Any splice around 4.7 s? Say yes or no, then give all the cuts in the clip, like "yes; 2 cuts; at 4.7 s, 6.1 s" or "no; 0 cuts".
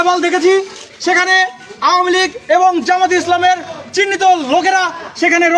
no; 0 cuts